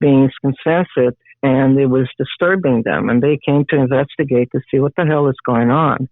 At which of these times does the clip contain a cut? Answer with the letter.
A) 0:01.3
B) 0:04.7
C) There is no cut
C